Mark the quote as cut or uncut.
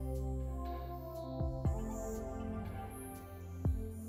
uncut